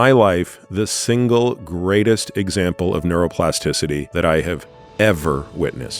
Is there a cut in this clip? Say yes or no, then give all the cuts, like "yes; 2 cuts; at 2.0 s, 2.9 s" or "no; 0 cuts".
yes; 1 cut; at 4.1 s